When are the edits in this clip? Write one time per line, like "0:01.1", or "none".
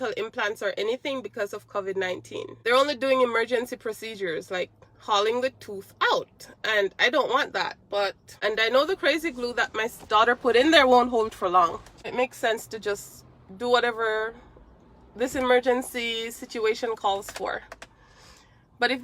0:02.6
0:08.3
0:12.1